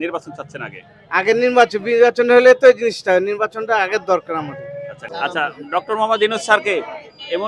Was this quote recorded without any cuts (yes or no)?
no